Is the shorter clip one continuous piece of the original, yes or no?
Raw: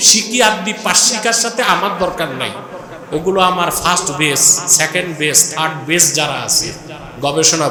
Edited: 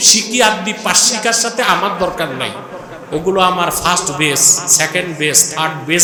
yes